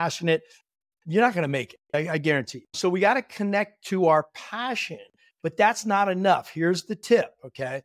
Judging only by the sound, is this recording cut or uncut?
cut